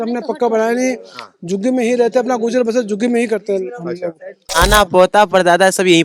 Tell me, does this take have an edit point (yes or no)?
yes